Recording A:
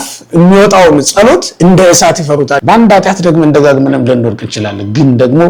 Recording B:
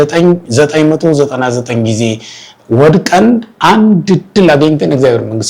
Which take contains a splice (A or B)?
A